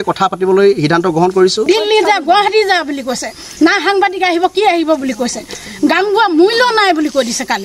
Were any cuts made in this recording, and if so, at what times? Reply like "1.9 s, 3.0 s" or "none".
1.6 s